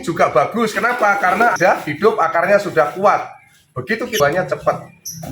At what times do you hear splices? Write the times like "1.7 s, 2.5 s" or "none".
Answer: 1.6 s, 4.1 s

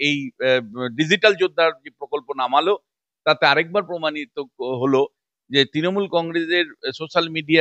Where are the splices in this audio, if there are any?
none

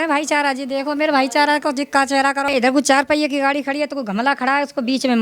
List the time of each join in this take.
2.5 s

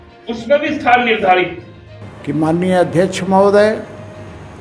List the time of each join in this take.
none

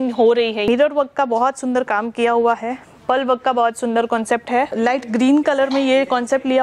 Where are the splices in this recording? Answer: 0.7 s, 4.7 s

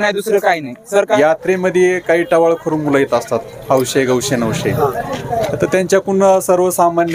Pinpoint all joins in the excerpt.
1.2 s

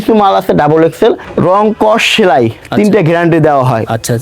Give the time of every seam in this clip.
1.3 s

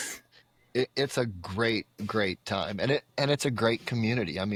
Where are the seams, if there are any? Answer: none

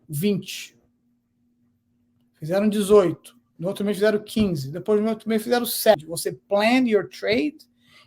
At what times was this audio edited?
5.9 s

